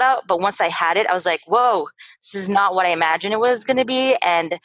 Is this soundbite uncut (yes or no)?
yes